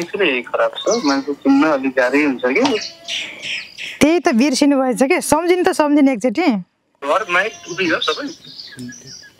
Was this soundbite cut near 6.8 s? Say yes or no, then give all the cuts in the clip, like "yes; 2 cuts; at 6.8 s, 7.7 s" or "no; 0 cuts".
yes; 1 cut; at 6.8 s